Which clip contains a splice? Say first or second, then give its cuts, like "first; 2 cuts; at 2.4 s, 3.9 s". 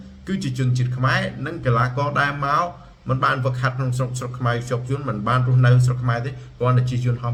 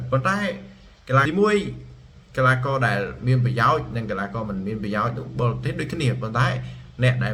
second; 1 cut; at 1.2 s